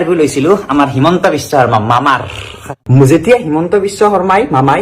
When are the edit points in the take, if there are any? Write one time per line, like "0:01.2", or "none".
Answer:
0:02.8